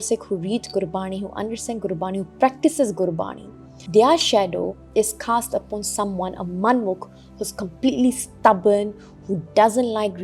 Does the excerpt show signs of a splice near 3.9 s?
yes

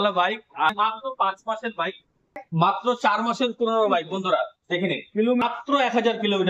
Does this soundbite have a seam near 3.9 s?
no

